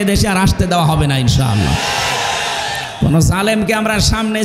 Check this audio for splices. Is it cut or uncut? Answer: uncut